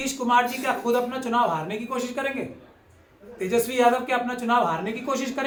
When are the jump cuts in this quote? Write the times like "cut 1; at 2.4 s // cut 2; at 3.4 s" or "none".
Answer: none